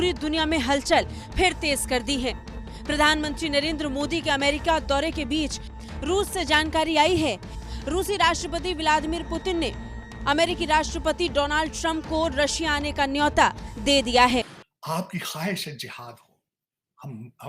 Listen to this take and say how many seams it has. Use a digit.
1